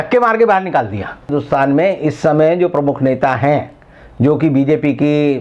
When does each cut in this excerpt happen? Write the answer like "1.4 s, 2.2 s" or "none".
1.3 s